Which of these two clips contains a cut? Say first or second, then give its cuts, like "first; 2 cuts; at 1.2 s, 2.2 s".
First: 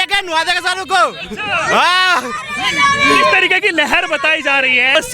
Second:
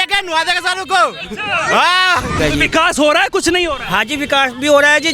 second; 1 cut; at 2.4 s